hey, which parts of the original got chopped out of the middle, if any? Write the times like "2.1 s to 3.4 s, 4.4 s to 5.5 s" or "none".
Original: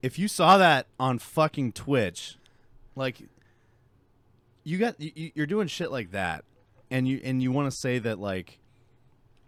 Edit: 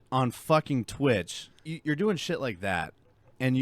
2.5 s to 5.1 s